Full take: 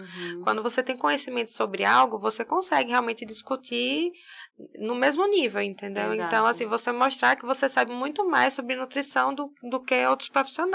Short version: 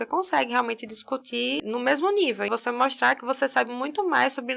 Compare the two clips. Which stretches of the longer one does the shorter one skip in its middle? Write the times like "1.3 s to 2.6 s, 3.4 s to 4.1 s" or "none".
4.0 s to 4.7 s, 5.6 s to 6.7 s